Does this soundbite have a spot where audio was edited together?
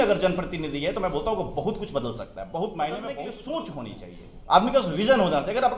yes; 1 cut; at 3.1 s

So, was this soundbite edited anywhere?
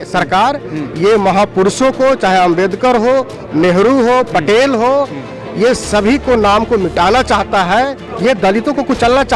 yes; 1 cut; at 8.1 s

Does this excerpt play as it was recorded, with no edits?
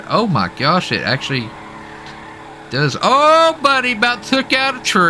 yes; 0 cuts

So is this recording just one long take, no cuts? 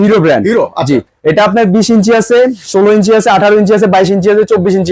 yes; 0 cuts

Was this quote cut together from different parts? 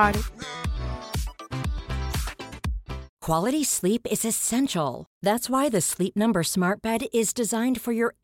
yes; 1 cut; at 3.1 s

